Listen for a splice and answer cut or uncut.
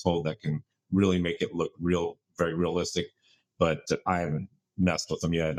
uncut